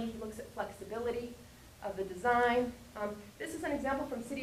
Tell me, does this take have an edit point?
no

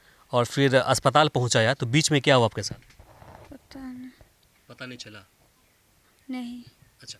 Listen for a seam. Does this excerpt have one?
no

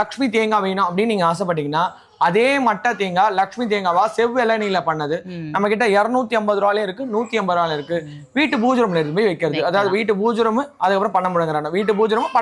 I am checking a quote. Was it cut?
no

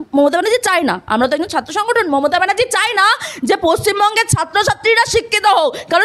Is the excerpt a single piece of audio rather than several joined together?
yes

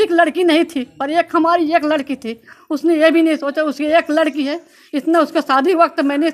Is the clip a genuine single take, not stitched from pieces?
yes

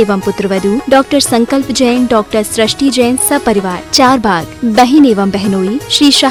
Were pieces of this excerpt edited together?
no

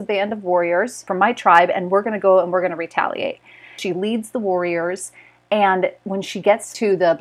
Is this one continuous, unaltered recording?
no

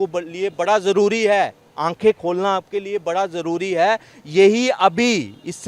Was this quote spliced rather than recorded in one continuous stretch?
no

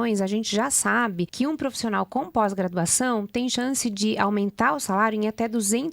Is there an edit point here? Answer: yes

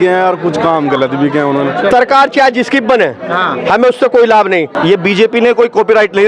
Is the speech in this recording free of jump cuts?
no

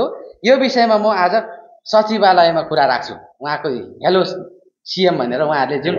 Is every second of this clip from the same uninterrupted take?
yes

